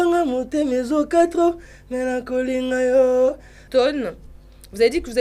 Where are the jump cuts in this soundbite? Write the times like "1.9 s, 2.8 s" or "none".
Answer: 3.6 s

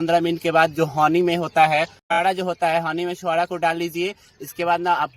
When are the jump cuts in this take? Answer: 2.0 s

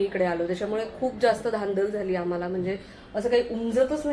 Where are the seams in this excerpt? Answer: none

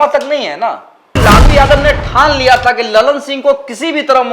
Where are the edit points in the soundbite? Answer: 1.2 s

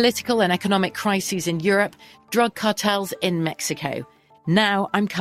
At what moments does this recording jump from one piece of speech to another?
none

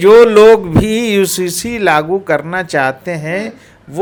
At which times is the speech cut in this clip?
none

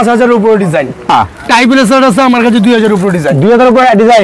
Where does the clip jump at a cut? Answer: 1.1 s

